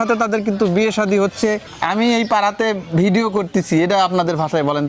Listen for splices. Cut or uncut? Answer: cut